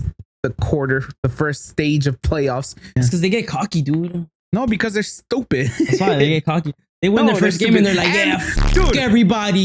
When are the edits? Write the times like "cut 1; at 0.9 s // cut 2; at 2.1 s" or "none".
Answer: cut 1; at 1.1 s // cut 2; at 2.8 s